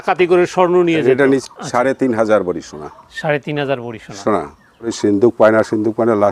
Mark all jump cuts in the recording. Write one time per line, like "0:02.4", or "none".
0:01.4
0:05.0